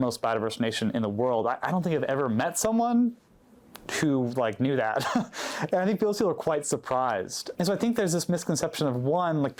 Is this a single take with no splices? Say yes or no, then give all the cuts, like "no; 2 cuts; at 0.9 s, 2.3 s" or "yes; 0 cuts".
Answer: yes; 0 cuts